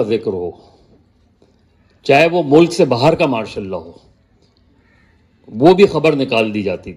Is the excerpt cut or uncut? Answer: uncut